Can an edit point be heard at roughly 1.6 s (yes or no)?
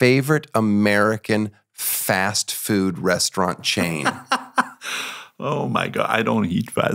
no